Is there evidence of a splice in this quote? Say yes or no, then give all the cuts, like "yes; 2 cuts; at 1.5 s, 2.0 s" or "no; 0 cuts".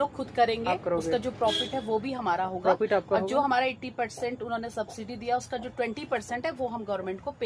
no; 0 cuts